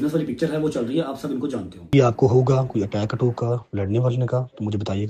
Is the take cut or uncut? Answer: cut